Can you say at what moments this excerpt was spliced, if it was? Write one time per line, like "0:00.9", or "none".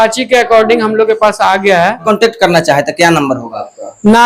0:02.0